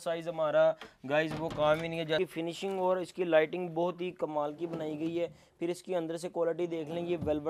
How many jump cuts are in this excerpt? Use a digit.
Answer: 1